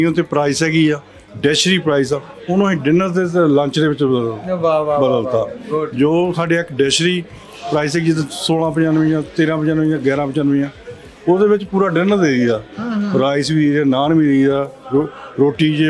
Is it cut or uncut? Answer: uncut